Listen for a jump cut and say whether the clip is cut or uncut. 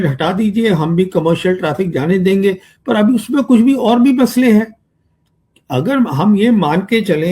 uncut